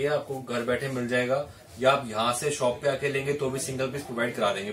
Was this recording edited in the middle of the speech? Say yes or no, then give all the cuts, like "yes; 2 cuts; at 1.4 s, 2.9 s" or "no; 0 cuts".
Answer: no; 0 cuts